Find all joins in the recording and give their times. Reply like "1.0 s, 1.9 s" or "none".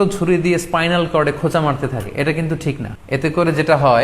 2.9 s